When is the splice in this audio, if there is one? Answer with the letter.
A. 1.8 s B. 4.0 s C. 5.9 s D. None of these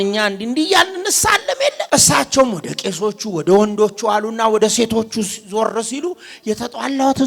A